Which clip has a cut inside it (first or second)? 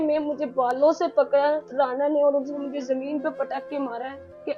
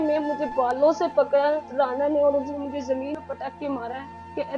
second